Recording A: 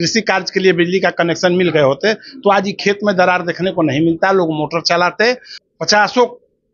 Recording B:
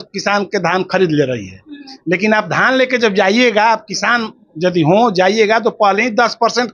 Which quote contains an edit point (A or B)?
A